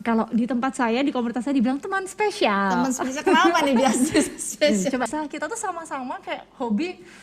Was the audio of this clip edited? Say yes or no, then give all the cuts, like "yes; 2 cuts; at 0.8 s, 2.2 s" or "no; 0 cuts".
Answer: yes; 1 cut; at 5.1 s